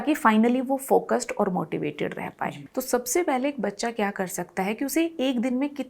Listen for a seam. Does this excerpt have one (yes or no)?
yes